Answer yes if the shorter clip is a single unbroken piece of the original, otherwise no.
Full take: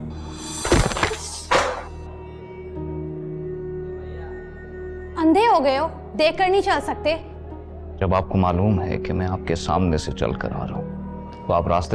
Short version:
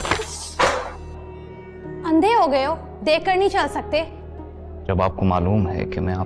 no